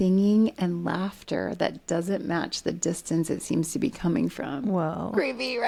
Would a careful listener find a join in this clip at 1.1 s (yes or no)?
no